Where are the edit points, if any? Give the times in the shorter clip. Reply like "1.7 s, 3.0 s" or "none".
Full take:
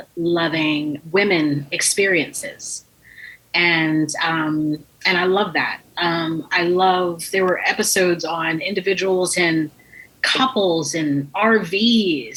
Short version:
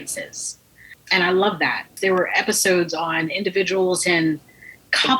1.0 s, 1.9 s

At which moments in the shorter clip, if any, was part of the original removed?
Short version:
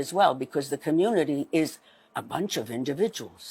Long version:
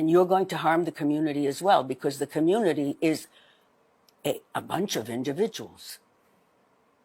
2.1 s

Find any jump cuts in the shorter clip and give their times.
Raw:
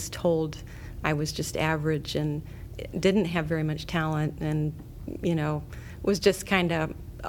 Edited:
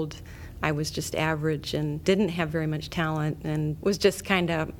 2.0 s, 3.8 s

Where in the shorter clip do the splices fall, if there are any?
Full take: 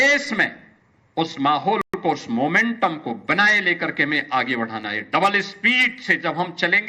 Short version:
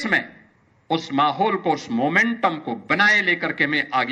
1.6 s

